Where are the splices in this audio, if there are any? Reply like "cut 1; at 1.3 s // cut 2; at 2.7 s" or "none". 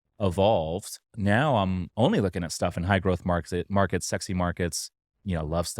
cut 1; at 1.0 s